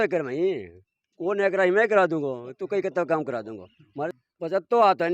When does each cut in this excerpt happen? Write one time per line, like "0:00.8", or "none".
0:04.1